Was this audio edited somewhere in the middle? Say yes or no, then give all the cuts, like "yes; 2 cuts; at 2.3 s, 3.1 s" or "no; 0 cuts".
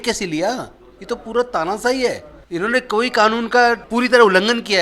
yes; 2 cuts; at 2.3 s, 3.8 s